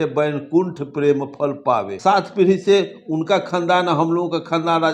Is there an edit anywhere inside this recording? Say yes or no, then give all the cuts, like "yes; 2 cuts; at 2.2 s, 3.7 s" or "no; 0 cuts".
yes; 1 cut; at 1.9 s